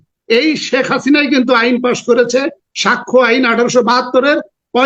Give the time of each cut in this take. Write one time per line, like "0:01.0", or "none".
none